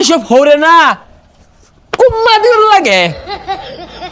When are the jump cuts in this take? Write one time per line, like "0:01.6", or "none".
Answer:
0:03.1